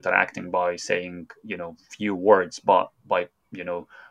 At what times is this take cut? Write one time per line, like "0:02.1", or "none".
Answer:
0:03.1